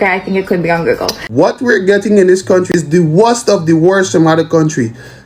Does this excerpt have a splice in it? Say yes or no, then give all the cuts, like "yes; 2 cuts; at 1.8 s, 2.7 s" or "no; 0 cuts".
yes; 2 cuts; at 1.2 s, 2.7 s